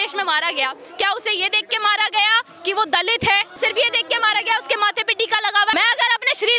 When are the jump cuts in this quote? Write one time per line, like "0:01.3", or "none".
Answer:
0:03.5
0:05.7